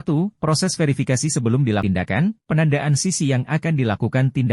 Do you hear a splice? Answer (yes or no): yes